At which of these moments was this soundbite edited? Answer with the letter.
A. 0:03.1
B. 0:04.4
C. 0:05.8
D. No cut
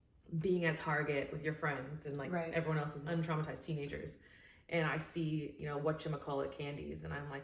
D